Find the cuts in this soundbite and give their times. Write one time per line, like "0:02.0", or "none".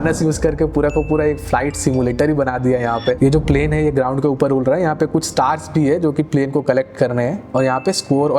0:03.2
0:07.4